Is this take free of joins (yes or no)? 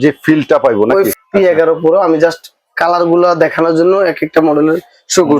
no